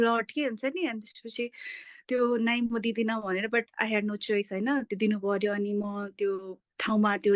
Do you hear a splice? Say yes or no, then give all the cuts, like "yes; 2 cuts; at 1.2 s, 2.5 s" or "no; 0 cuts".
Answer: no; 0 cuts